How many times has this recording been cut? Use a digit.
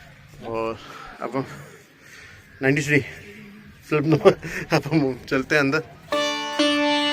1